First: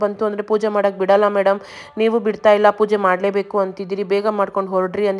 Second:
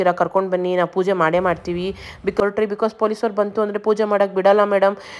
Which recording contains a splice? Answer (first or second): second